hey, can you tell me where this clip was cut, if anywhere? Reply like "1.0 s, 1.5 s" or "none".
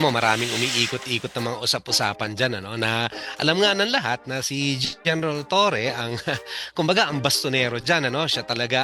none